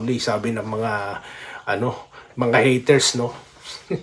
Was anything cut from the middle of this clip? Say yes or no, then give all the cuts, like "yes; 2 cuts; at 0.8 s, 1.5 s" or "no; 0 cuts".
no; 0 cuts